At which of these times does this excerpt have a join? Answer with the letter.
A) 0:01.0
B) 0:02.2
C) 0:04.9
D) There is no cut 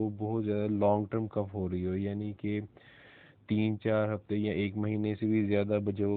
D